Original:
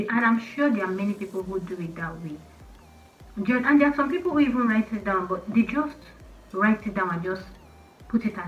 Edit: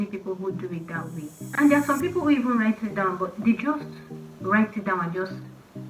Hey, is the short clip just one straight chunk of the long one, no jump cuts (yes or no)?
no